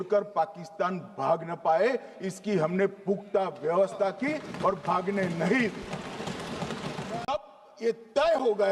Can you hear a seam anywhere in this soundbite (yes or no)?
yes